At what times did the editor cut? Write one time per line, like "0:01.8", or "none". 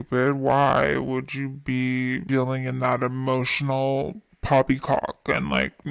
none